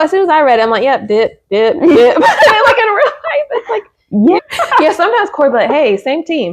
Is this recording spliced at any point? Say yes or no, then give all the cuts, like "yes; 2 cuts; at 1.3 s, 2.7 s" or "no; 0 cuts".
yes; 1 cut; at 4.4 s